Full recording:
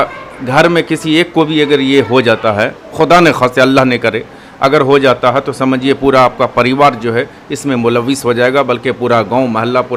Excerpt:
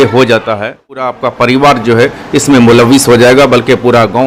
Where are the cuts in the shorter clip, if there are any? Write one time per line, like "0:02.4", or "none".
0:01.0